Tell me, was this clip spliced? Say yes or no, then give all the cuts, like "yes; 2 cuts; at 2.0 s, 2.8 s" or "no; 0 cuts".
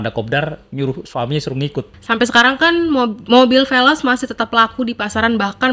yes; 1 cut; at 1.9 s